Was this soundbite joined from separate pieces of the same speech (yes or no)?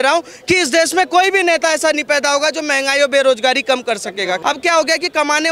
yes